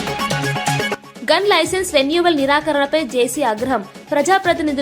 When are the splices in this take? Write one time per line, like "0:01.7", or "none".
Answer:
0:01.0